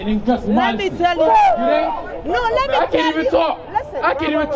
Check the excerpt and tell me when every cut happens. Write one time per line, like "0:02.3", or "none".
none